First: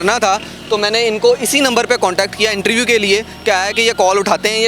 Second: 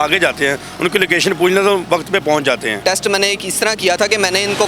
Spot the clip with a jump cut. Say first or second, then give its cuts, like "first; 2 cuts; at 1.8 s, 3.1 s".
second; 1 cut; at 2.8 s